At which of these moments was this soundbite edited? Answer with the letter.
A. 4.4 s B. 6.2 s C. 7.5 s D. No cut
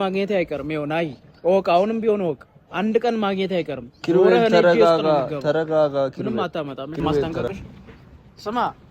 C